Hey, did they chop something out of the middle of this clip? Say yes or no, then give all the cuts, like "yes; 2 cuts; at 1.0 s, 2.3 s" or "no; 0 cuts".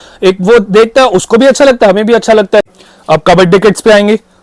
yes; 1 cut; at 2.7 s